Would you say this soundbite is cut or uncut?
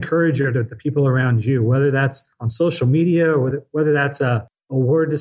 cut